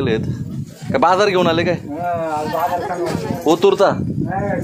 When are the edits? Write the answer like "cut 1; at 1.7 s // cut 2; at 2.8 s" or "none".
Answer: none